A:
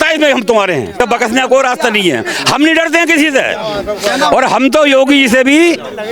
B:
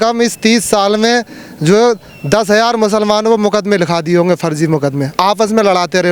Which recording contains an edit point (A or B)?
A